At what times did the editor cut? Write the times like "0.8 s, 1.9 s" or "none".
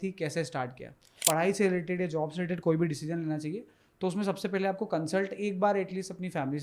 1.1 s